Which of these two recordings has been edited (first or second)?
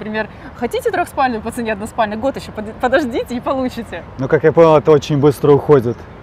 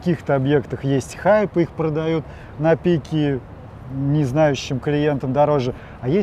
first